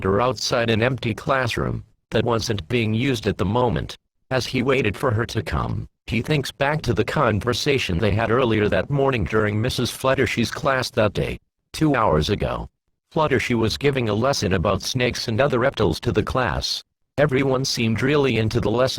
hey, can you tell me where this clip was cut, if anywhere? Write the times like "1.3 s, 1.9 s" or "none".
none